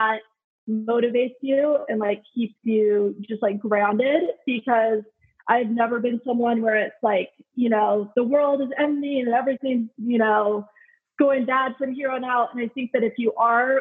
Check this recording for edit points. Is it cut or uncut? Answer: uncut